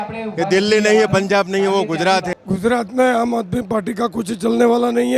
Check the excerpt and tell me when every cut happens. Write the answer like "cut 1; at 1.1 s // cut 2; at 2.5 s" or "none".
cut 1; at 2.3 s